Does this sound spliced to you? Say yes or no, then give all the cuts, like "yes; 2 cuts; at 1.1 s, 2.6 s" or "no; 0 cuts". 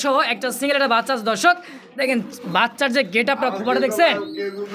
no; 0 cuts